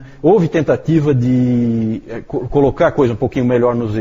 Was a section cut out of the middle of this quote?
yes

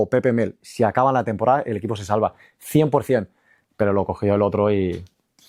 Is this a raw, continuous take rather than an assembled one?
yes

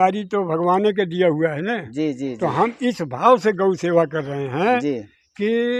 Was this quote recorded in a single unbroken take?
yes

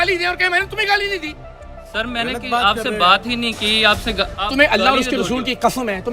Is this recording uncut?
yes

